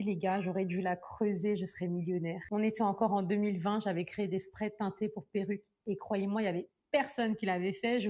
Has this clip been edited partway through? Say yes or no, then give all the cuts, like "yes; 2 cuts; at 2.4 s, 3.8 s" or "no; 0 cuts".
no; 0 cuts